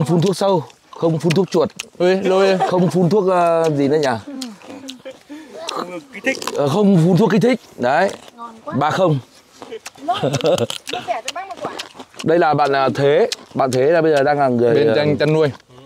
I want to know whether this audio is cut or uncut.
uncut